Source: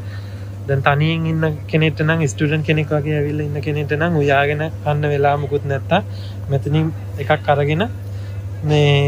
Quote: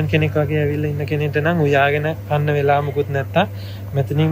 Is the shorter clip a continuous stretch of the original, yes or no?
yes